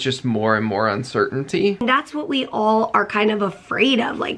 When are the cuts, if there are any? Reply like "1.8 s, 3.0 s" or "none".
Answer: 1.8 s